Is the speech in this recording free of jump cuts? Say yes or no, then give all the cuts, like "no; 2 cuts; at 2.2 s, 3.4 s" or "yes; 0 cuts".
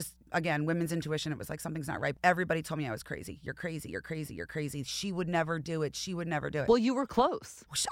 no; 1 cut; at 2.1 s